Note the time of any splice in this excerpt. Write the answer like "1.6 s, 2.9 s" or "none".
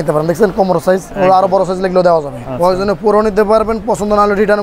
1.1 s, 2.4 s